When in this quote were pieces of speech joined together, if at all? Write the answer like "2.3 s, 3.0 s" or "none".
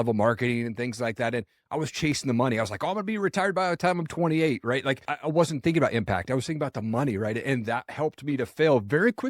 5.1 s